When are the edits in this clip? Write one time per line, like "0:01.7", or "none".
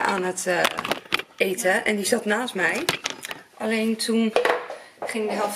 none